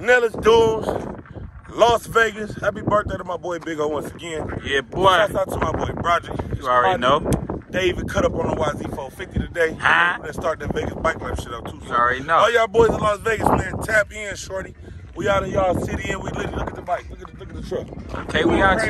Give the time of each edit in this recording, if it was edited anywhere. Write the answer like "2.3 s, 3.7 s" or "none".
none

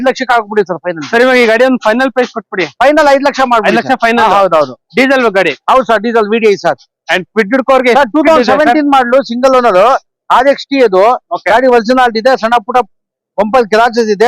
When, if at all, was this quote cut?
none

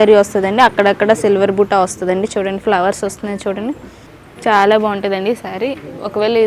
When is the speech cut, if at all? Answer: none

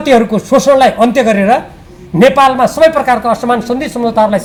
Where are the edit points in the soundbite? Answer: none

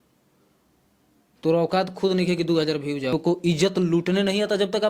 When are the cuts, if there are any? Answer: 3.1 s

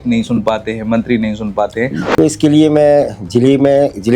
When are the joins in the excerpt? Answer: 2.0 s

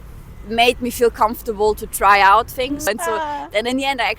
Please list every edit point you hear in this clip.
2.9 s

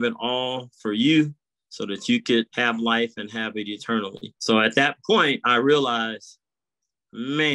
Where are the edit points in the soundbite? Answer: 2.5 s, 4.3 s

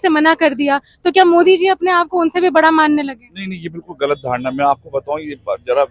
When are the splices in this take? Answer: none

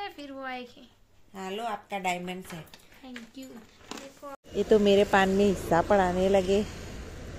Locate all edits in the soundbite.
4.3 s

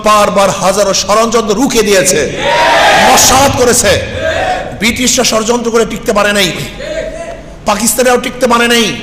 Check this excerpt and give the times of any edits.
none

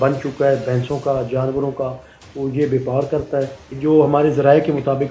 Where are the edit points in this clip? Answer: 3.6 s

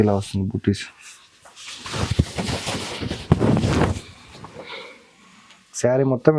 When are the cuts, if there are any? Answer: none

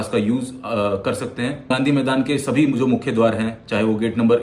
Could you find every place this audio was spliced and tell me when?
1.7 s

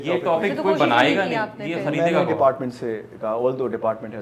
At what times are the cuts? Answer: none

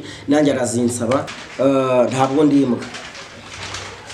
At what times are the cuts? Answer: 1.4 s

